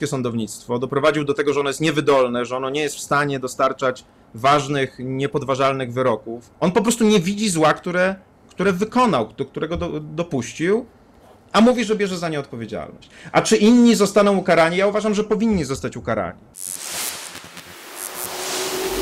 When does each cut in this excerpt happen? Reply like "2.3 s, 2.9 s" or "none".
6.4 s, 16.5 s